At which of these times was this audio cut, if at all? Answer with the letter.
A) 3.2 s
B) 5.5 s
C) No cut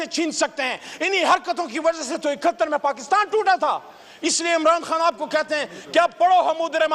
C